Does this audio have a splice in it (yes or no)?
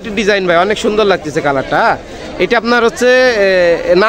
no